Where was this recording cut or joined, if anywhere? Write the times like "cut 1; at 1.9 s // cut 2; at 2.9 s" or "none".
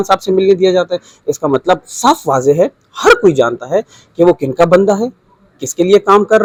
none

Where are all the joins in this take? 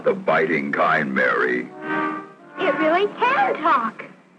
none

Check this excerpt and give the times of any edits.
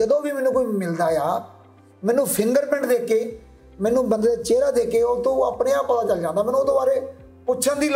none

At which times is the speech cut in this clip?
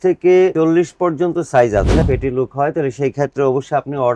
cut 1; at 2.0 s

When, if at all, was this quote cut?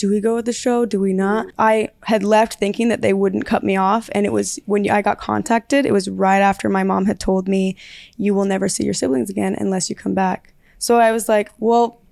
cut 1; at 1.5 s

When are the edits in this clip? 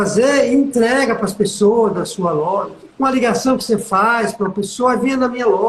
cut 1; at 2.8 s

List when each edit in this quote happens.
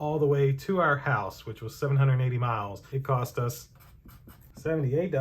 cut 1; at 2.8 s

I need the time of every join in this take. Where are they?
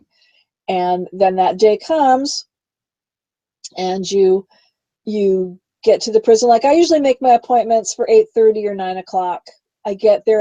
none

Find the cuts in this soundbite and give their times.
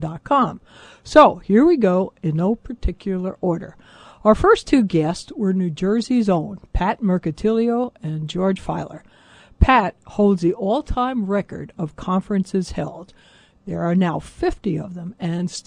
cut 1; at 1.0 s

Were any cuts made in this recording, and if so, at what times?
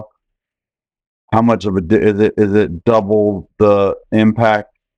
none

